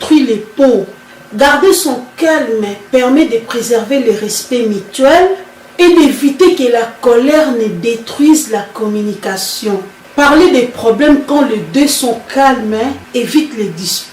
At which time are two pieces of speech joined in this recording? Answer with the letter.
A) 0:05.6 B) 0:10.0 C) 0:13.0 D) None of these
B